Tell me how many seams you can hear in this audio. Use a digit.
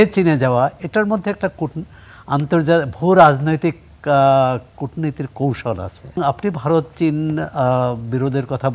1